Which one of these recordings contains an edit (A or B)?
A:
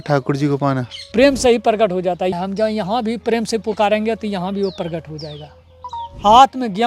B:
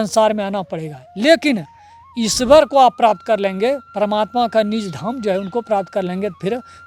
A